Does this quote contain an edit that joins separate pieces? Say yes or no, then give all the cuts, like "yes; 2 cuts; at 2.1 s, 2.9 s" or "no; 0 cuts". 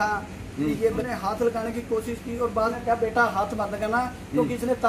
yes; 2 cuts; at 1.0 s, 2.7 s